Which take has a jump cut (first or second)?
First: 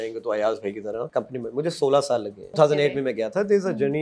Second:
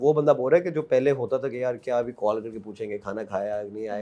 first